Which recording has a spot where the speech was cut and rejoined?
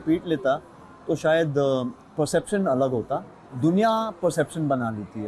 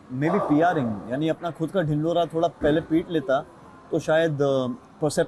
first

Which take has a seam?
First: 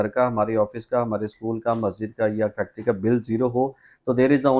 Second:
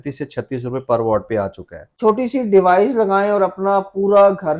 second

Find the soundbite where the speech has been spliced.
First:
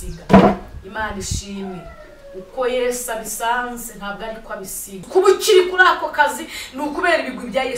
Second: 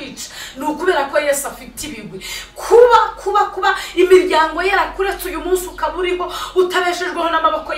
first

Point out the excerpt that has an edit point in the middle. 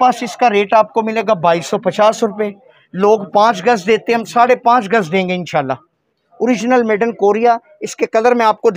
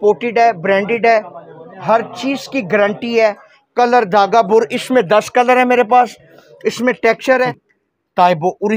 second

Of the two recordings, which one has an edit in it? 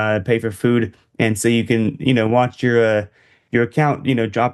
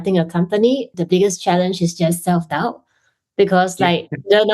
second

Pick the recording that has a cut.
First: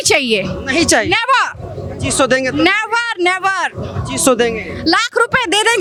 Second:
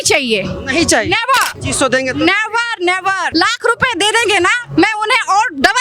second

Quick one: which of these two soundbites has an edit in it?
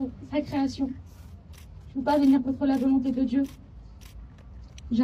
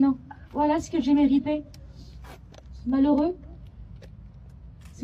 first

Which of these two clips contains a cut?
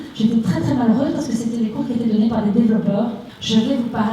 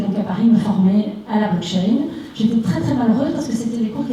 first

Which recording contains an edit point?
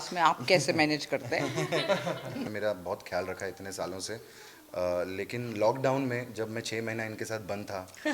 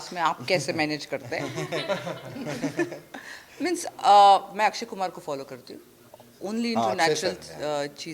first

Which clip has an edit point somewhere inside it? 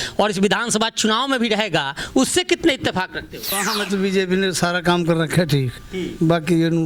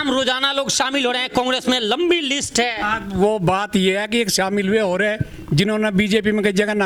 first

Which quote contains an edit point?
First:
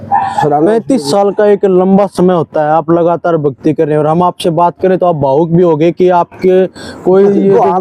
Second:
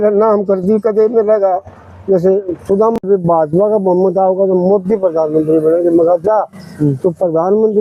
second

